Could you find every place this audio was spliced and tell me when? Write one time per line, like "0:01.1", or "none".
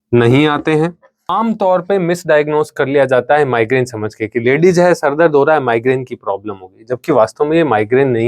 0:01.3